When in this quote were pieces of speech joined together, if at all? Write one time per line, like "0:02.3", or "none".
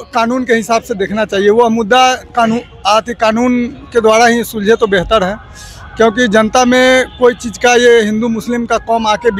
none